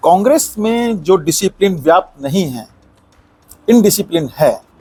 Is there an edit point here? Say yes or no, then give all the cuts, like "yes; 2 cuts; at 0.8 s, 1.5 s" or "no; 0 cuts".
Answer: no; 0 cuts